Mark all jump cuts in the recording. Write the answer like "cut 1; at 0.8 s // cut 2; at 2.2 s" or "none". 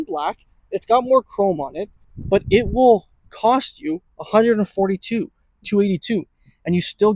none